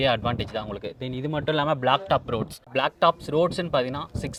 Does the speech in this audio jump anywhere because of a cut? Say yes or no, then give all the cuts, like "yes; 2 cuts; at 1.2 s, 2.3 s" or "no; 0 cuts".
no; 0 cuts